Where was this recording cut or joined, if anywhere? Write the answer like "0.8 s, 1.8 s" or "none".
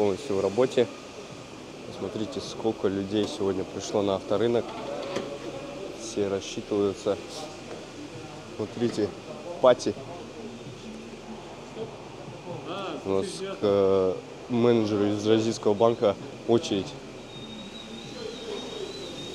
7.3 s